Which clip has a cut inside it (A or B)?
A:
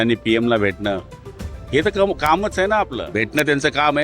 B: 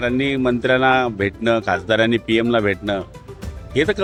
A